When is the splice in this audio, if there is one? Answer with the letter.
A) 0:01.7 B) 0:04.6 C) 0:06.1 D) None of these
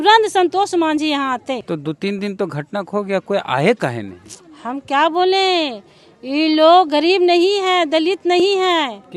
A